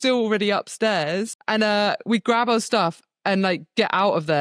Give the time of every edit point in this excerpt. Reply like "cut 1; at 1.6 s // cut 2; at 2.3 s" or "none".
cut 1; at 1.4 s